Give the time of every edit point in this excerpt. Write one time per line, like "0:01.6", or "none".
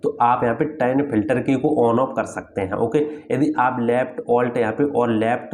none